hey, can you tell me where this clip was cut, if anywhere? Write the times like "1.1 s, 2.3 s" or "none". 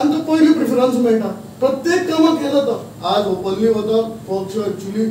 2.9 s